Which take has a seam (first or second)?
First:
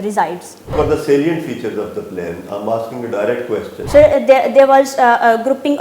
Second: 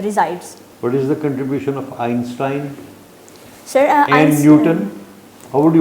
first